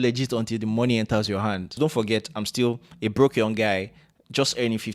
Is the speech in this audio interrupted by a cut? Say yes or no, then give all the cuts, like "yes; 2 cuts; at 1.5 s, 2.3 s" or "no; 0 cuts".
yes; 1 cut; at 1.7 s